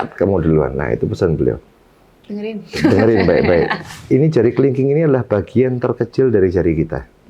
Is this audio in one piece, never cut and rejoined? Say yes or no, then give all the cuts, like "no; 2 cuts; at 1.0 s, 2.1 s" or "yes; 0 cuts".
no; 1 cut; at 3.9 s